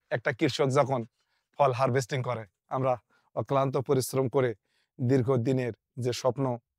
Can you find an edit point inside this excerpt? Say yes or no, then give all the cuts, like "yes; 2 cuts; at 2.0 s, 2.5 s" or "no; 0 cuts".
no; 0 cuts